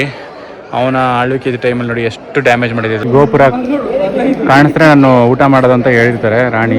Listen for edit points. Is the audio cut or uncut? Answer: cut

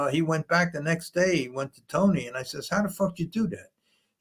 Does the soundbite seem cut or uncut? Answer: uncut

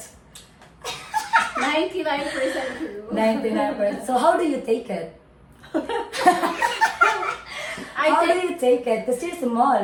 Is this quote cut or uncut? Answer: uncut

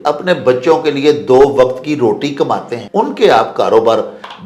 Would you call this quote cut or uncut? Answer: cut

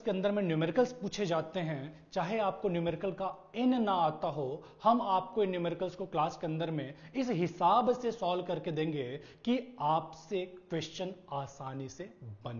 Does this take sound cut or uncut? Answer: uncut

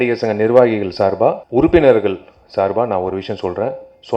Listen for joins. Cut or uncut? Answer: cut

